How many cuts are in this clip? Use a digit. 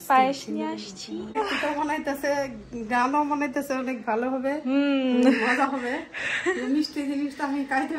1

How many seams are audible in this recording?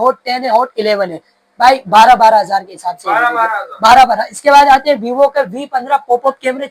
0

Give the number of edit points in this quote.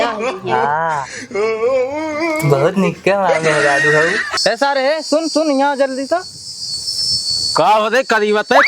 1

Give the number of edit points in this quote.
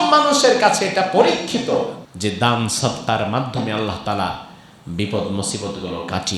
1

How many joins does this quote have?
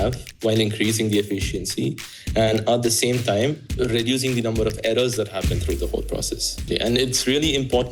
1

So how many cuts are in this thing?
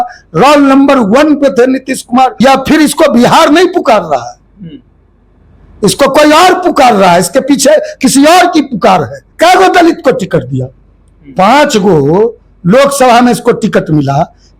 2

